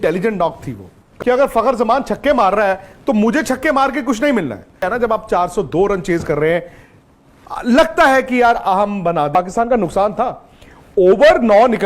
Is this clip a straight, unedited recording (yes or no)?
no